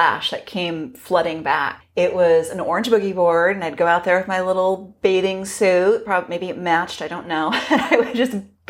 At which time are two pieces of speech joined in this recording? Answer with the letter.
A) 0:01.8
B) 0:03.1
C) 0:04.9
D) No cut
A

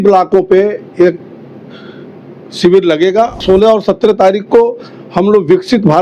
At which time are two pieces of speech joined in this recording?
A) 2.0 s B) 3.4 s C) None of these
B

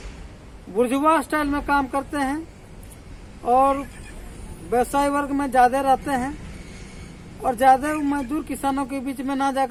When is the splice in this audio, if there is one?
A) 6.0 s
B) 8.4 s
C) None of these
C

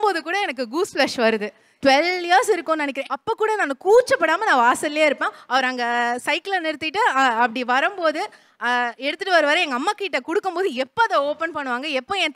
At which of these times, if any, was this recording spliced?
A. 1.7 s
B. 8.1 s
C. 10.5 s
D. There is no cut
A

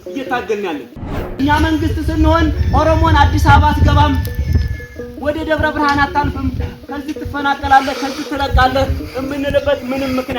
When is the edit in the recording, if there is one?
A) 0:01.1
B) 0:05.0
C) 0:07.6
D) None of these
A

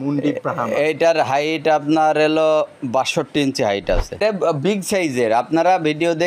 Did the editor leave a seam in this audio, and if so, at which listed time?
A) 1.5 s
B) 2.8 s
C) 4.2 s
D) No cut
C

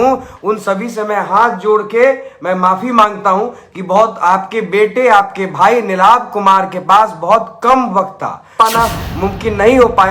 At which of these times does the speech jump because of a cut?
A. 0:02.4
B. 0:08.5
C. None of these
B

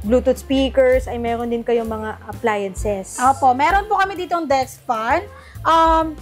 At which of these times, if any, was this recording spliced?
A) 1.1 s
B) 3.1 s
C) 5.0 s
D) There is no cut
D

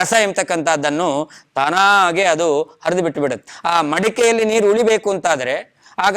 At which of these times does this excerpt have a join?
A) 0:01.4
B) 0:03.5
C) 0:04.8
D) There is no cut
B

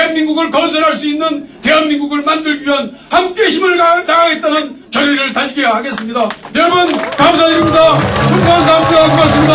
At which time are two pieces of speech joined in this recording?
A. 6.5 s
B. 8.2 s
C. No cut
C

